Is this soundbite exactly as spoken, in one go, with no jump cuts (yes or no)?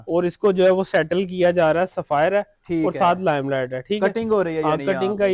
yes